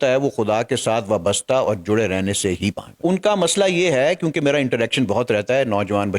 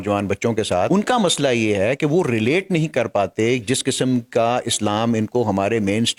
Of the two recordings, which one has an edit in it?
first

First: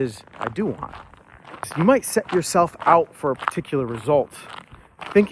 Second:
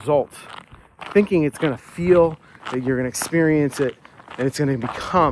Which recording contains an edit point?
first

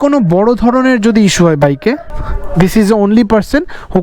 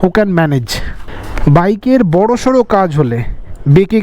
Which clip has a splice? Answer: second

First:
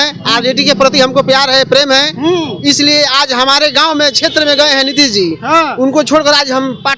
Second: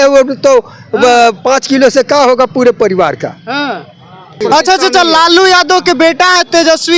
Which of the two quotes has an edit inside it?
second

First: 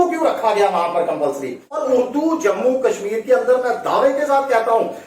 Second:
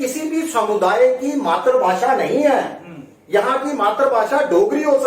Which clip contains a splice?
first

